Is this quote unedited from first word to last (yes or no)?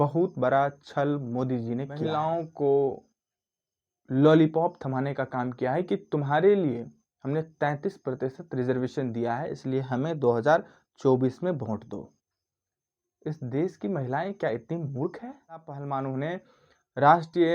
no